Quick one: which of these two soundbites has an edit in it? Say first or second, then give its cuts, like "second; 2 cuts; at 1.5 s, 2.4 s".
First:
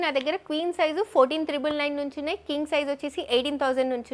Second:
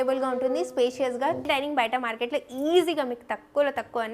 second; 1 cut; at 1.4 s